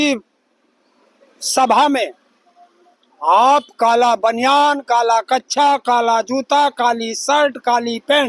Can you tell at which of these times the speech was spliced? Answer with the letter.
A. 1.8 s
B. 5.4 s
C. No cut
C